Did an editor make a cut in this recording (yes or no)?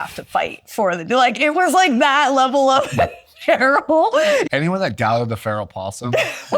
yes